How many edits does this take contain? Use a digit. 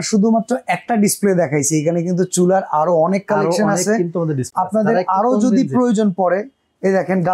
0